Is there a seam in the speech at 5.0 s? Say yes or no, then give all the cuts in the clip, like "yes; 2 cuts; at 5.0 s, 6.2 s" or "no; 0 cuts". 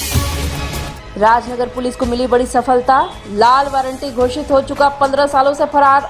no; 1 cut; at 0.9 s